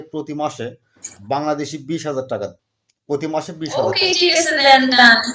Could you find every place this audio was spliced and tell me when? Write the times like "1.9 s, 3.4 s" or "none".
2.7 s

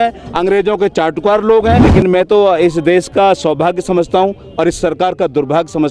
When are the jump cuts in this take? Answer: 1.8 s

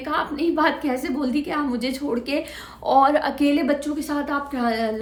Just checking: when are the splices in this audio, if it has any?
none

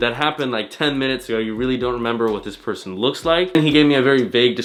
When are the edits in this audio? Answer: none

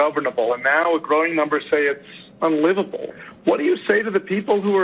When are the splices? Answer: 3.1 s

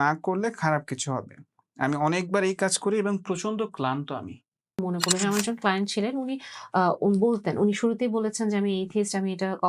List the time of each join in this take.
4.8 s

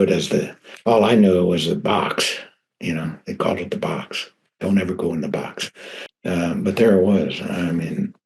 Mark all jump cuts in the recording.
6.0 s

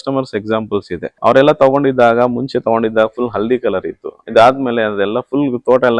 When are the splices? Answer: 1.0 s

